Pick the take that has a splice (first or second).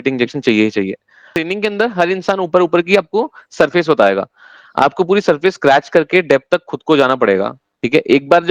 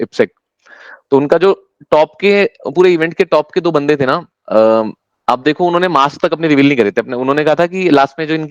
first